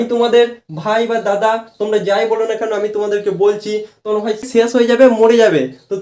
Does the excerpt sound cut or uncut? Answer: cut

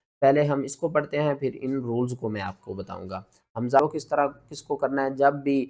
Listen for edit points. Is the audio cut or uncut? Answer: cut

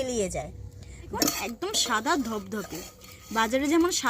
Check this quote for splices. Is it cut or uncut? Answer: cut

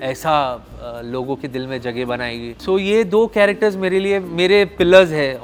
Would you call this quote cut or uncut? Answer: uncut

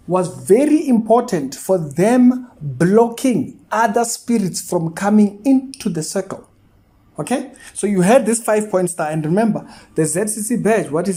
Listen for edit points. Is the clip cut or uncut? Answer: uncut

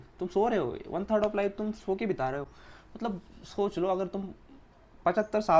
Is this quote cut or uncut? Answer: uncut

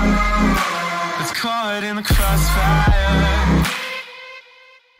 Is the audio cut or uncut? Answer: cut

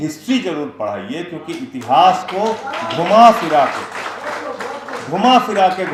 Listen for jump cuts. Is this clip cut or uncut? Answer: uncut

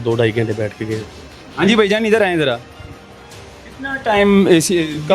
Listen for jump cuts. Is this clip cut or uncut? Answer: uncut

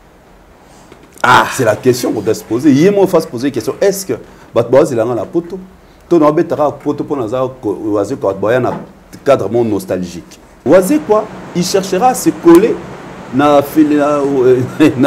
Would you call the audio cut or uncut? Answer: cut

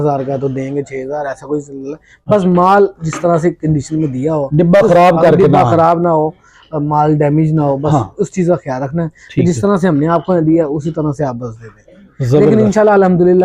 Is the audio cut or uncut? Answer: uncut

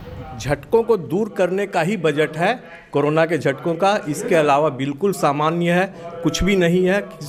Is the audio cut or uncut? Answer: uncut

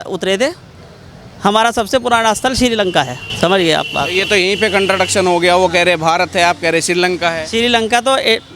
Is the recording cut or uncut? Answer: cut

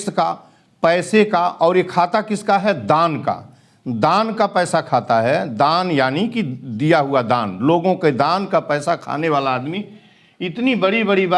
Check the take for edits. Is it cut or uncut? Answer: uncut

